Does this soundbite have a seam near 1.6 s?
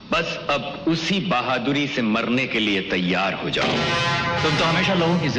no; 1 cut; at 4.4 s

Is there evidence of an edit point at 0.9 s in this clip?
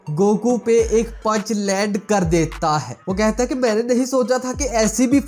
no; 1 cut; at 3.0 s

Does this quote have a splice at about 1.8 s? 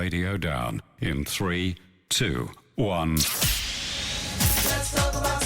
no; 1 cut; at 3.3 s

